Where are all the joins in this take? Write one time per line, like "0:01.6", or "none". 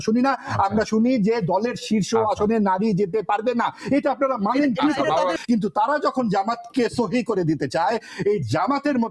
0:05.3